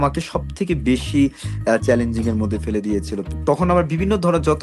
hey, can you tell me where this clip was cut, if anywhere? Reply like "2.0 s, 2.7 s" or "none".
3.3 s